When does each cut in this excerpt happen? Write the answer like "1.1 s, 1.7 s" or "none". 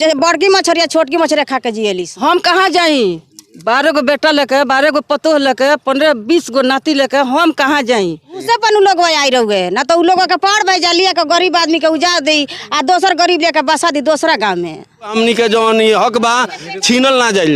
2.1 s, 8.4 s, 15.1 s